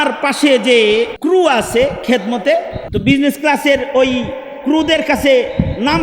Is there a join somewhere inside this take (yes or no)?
yes